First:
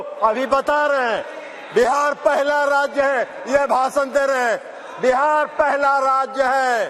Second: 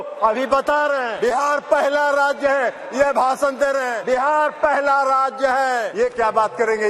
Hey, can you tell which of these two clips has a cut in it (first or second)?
second